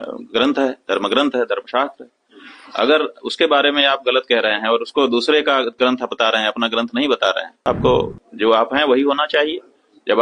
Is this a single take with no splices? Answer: no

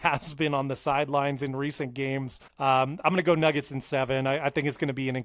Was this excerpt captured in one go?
no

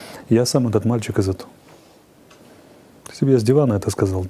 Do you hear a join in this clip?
no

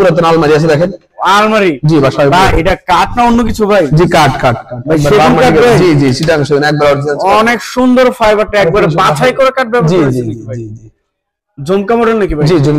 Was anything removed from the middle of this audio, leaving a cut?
no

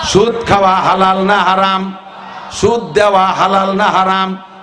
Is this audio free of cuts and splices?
yes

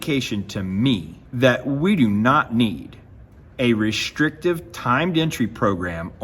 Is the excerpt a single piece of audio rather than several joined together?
no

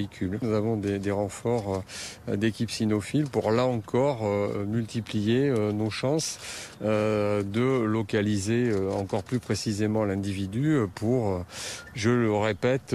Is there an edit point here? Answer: yes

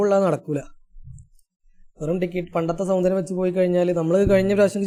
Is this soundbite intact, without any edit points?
yes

